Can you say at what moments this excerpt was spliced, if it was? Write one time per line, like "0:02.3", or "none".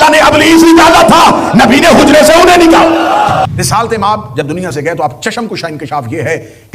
0:03.5